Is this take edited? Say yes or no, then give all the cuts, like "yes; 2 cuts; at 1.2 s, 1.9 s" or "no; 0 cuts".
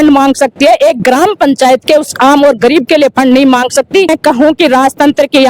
yes; 1 cut; at 4.1 s